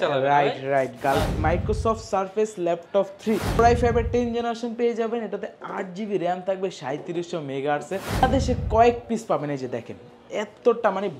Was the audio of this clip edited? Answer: yes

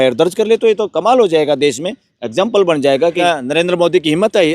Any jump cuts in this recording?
yes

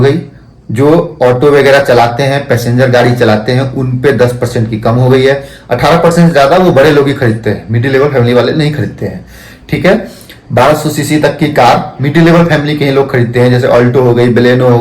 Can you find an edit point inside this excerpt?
no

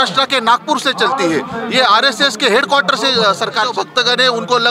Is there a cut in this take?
yes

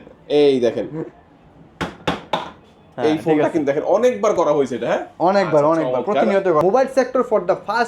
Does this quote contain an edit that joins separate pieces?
yes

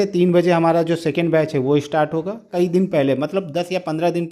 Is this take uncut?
no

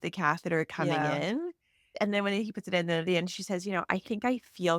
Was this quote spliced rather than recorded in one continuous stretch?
no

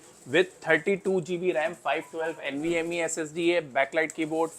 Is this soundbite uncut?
yes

